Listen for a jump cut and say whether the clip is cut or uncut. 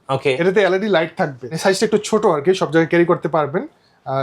cut